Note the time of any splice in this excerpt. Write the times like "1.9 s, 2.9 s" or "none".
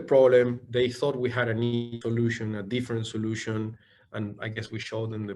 none